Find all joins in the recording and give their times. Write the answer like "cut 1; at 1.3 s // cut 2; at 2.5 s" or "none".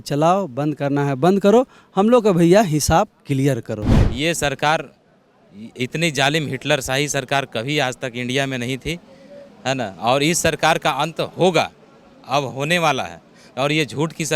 cut 1; at 4.0 s